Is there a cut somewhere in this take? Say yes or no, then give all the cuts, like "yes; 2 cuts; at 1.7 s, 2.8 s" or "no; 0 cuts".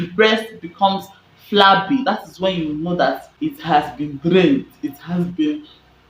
yes; 1 cut; at 3.0 s